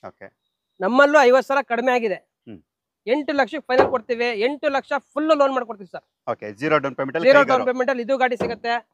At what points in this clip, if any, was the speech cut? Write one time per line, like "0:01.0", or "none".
none